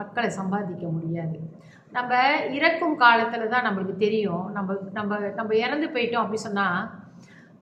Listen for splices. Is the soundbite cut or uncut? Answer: uncut